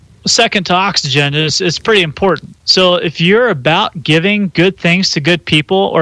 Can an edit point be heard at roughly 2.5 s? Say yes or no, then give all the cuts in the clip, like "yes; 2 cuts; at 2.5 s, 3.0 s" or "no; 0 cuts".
yes; 1 cut; at 2.5 s